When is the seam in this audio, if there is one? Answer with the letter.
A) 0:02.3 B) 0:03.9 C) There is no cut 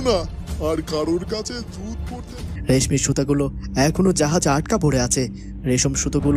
A